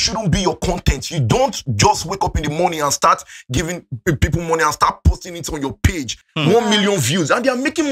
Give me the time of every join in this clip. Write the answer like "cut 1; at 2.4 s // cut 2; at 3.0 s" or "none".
cut 1; at 6.2 s